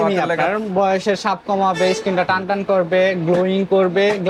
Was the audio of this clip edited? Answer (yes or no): no